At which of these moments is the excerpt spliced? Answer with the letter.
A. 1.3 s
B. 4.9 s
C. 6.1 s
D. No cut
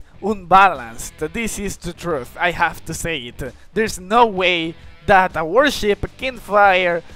D